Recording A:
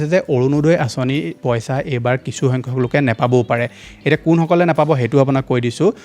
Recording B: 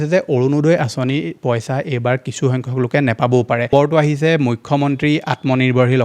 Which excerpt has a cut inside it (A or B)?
B